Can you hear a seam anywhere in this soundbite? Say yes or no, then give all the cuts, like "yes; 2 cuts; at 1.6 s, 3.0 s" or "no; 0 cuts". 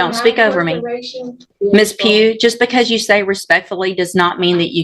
yes; 1 cut; at 1.4 s